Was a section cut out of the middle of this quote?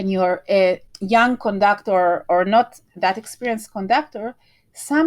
yes; 1 cut; at 0.9 s

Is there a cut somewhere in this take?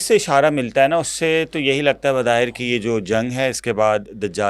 no; 0 cuts

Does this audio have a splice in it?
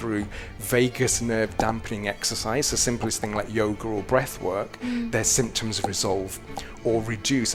no; 0 cuts

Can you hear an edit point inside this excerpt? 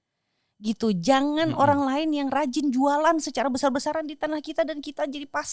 no; 0 cuts

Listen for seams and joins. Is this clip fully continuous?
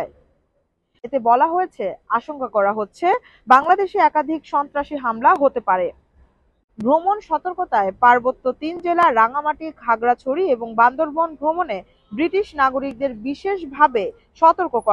no; 1 cut; at 1.0 s

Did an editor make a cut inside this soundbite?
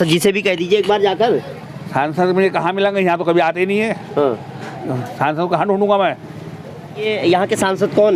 no; 0 cuts

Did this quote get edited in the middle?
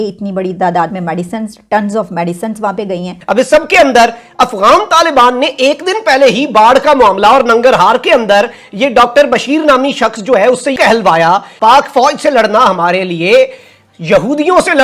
yes; 2 cuts; at 3.1 s, 11.4 s

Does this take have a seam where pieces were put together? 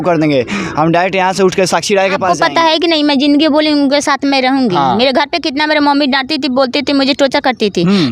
yes; 1 cut; at 2.2 s

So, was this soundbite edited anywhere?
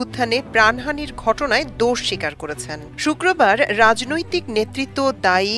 no; 0 cuts

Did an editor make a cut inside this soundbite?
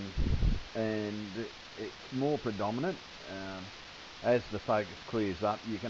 yes; 1 cut; at 1.7 s

